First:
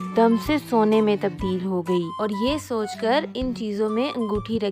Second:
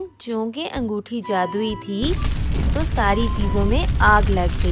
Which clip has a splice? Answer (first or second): first